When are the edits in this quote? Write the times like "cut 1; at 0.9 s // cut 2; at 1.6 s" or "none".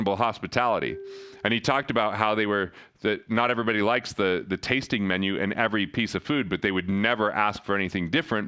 none